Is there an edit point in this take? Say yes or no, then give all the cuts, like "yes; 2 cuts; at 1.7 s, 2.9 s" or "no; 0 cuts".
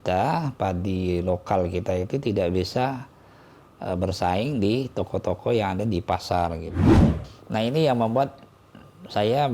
yes; 1 cut; at 6.9 s